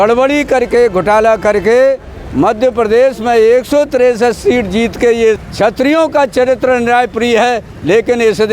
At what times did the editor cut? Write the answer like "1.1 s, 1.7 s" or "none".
5.4 s